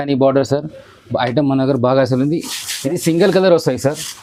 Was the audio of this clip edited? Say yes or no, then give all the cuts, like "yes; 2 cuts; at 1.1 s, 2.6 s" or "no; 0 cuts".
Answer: no; 0 cuts